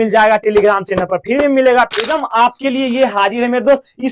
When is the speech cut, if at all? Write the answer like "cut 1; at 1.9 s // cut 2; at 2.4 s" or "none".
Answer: cut 1; at 2.0 s